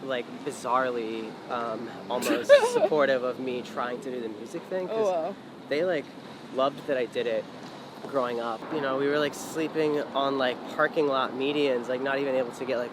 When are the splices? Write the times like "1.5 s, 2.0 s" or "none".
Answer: 8.6 s